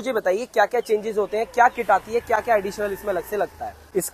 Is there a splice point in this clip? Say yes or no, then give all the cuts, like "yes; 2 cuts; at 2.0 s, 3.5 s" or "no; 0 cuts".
no; 0 cuts